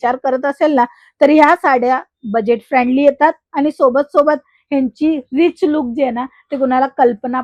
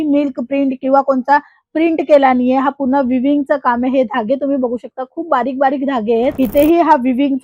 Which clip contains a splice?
second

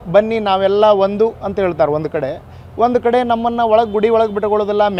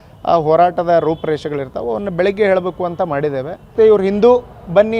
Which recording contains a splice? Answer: second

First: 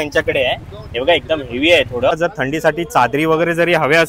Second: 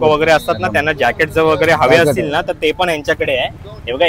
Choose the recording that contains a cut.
first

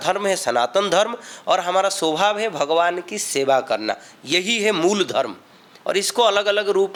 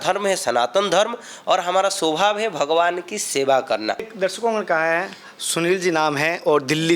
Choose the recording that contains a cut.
second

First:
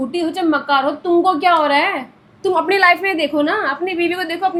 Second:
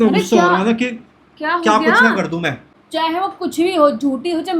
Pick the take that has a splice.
second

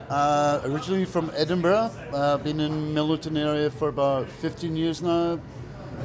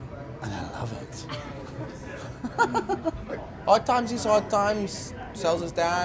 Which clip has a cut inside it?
first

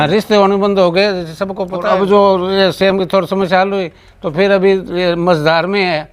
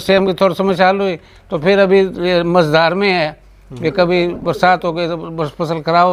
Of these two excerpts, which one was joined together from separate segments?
first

